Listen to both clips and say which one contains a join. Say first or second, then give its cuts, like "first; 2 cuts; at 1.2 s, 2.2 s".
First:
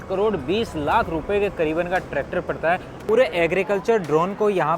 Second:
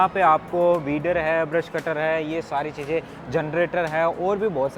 first; 1 cut; at 3.0 s